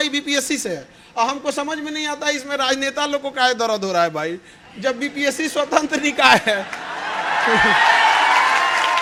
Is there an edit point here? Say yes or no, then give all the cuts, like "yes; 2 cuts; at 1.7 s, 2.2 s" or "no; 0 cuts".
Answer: no; 0 cuts